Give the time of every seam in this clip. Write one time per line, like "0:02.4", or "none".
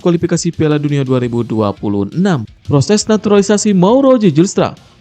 0:02.5